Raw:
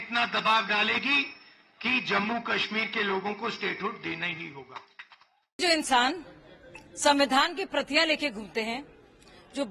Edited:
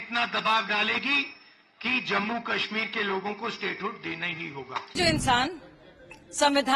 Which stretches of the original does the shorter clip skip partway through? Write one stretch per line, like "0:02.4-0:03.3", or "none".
0:04.9-0:05.5